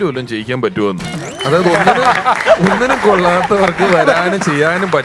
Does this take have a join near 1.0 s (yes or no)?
no